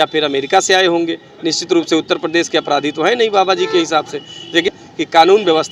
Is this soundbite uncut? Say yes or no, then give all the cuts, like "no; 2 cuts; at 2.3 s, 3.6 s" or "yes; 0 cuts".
yes; 0 cuts